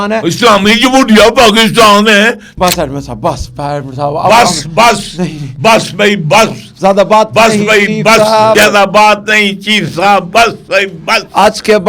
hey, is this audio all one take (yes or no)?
no